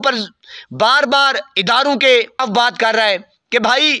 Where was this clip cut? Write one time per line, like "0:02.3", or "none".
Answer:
none